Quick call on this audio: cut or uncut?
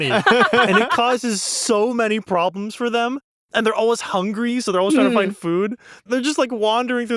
cut